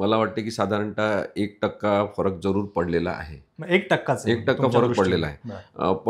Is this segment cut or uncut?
uncut